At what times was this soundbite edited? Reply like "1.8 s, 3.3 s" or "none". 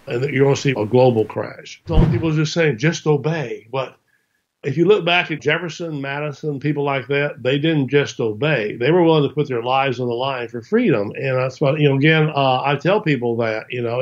1.9 s